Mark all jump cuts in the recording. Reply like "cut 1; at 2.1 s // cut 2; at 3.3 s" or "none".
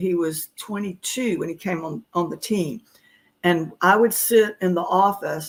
none

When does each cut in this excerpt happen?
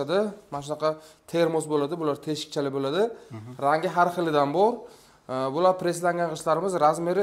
none

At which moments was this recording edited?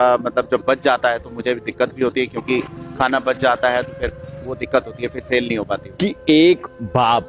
cut 1; at 5.9 s

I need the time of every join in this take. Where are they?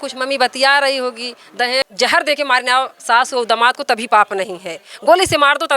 cut 1; at 1.8 s

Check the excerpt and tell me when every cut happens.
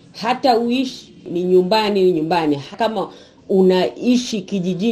cut 1; at 1.3 s // cut 2; at 2.7 s

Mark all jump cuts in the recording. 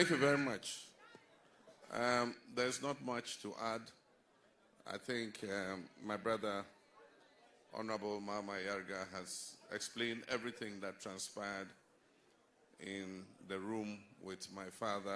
cut 1; at 2.4 s

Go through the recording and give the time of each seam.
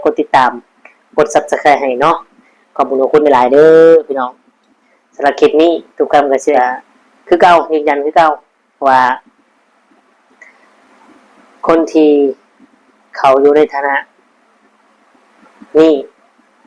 cut 1; at 6.5 s

